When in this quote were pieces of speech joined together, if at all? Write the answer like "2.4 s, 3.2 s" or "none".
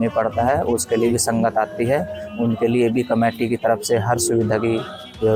none